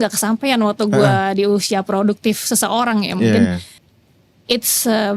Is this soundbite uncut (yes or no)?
no